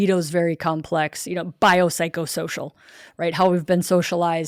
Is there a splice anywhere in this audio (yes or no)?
no